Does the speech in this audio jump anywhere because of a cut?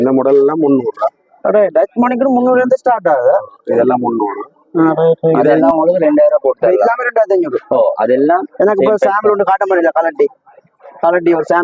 yes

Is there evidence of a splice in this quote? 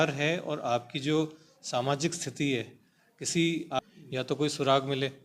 yes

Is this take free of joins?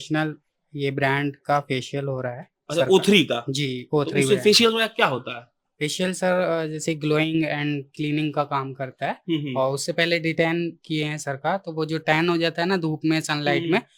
yes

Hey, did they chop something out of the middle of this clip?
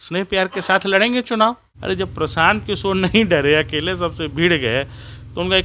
yes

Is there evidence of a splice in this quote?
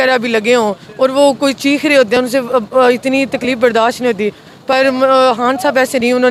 no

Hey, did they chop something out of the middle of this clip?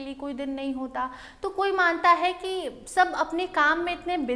no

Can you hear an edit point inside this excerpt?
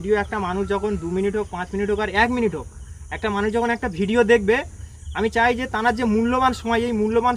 no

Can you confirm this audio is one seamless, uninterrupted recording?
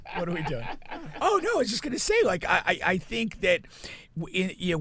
no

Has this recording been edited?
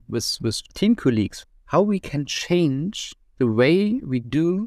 yes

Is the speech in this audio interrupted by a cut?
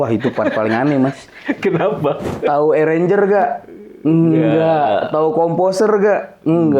yes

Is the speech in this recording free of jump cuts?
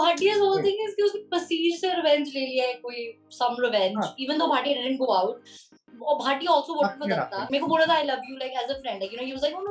no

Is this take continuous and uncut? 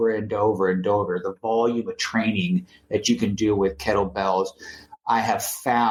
yes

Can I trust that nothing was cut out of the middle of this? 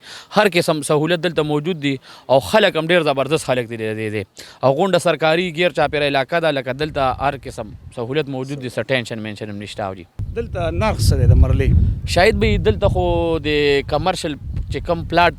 no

